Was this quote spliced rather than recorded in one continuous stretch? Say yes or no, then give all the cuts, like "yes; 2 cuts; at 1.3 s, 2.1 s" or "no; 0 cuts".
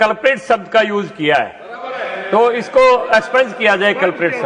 no; 0 cuts